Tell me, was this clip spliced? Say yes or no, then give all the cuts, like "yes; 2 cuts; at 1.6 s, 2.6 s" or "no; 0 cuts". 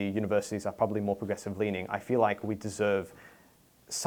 no; 0 cuts